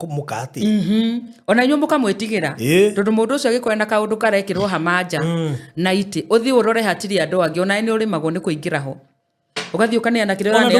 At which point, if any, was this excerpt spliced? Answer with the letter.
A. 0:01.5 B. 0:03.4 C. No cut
C